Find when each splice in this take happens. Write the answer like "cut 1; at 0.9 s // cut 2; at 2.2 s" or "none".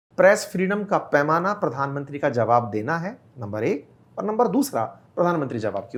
none

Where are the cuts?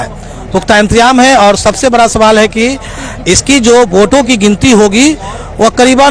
none

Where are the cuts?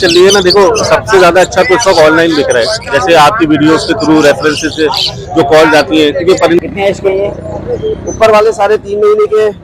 cut 1; at 6.6 s

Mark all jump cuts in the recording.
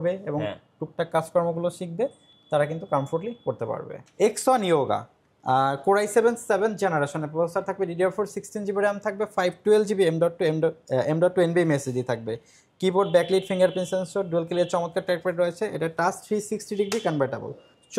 cut 1; at 4.0 s

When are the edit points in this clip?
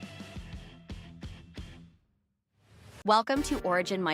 cut 1; at 3.0 s

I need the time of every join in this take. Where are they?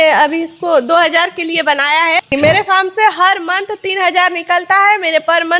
cut 1; at 2.3 s

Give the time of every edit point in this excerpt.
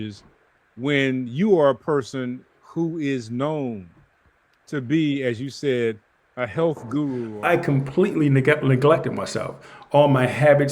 cut 1; at 7.3 s

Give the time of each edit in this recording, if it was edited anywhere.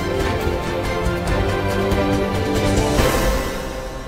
none

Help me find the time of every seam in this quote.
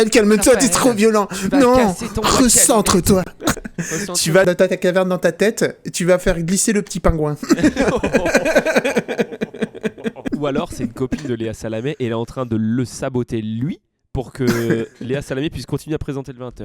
cut 1; at 3.6 s // cut 2; at 10.2 s

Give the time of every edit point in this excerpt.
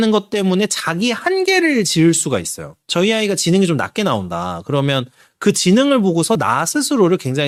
none

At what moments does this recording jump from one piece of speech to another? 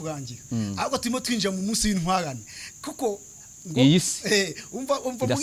none

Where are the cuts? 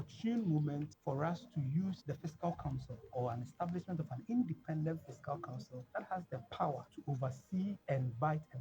cut 1; at 0.9 s // cut 2; at 2.0 s // cut 3; at 5.8 s // cut 4; at 6.9 s // cut 5; at 7.8 s

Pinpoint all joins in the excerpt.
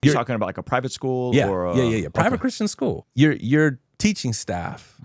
cut 1; at 3.0 s

